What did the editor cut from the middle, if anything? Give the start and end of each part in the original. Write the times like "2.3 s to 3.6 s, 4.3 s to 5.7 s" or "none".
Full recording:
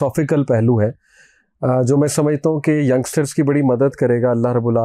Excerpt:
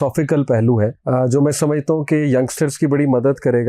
1.0 s to 1.5 s